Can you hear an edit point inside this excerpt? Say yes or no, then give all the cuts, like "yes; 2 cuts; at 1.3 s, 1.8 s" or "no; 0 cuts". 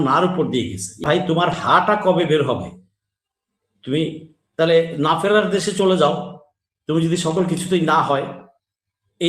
yes; 1 cut; at 1.0 s